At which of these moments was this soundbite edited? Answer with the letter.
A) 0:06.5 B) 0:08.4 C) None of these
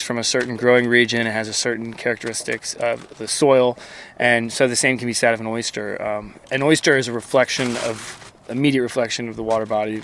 A